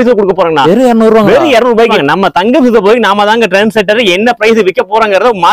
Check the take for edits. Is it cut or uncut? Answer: cut